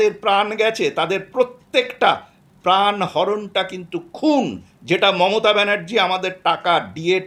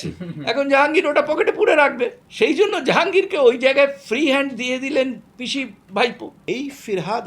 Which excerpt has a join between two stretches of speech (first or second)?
second